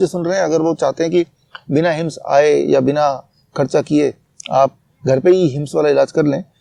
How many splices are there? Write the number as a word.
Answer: zero